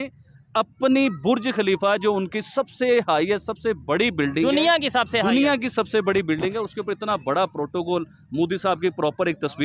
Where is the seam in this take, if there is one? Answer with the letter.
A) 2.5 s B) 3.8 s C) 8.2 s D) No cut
D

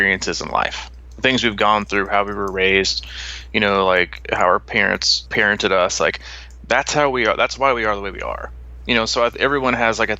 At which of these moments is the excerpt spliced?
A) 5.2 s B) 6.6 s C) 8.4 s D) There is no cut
A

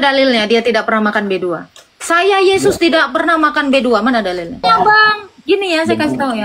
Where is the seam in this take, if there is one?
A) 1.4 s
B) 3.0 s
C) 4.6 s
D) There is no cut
C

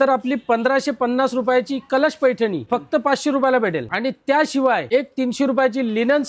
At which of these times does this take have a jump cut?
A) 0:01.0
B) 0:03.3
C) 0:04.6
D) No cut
D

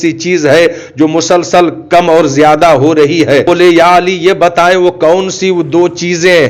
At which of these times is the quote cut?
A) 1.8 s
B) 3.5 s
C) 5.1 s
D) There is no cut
B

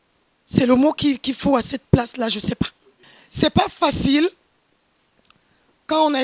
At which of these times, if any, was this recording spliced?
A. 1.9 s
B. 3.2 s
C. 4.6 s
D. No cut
B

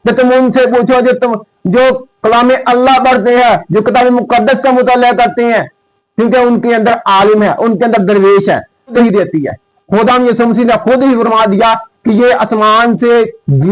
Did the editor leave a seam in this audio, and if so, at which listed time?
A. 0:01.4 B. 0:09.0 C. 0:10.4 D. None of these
B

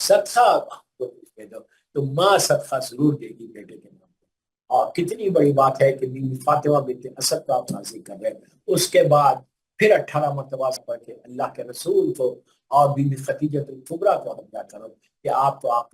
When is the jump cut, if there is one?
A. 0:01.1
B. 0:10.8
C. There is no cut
B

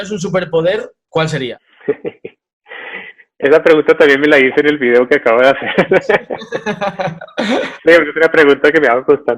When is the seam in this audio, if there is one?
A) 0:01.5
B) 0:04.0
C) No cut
A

